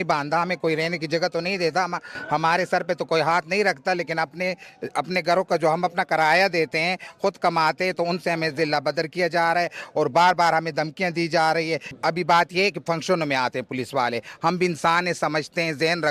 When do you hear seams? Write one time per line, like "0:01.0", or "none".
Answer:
none